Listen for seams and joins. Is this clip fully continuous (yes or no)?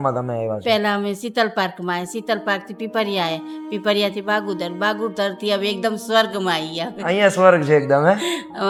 yes